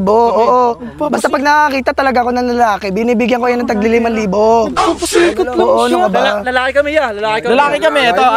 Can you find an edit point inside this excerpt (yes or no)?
no